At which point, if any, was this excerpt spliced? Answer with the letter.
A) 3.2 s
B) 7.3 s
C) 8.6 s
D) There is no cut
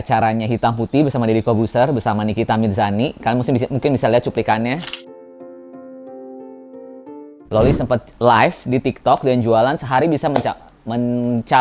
B